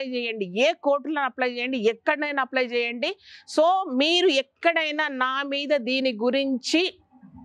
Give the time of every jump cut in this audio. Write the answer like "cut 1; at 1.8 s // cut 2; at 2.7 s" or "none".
none